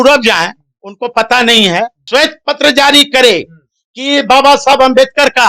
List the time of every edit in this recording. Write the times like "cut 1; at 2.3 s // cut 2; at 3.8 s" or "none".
cut 1; at 2.0 s